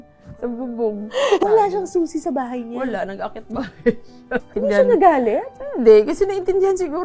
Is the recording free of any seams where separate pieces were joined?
no; 2 cuts; at 1.4 s, 4.4 s

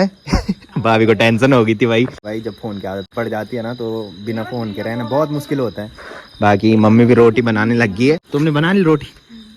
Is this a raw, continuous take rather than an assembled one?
yes; 0 cuts

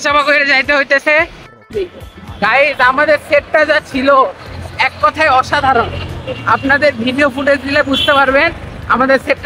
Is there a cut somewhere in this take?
yes; 1 cut; at 1.6 s

